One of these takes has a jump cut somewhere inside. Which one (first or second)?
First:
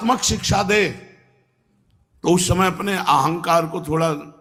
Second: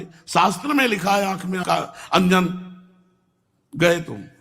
second